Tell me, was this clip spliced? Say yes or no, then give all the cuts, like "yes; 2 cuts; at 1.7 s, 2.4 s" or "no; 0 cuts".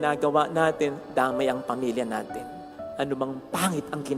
no; 0 cuts